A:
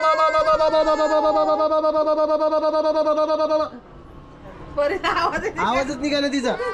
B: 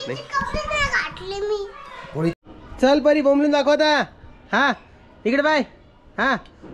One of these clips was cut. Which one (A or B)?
B